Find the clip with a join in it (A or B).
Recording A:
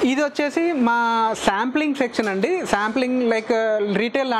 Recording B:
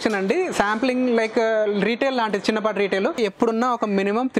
B